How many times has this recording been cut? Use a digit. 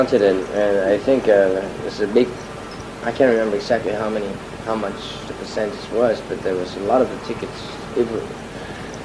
0